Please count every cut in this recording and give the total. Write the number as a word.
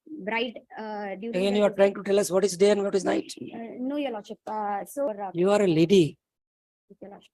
one